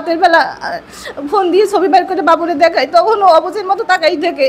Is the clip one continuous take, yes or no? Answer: yes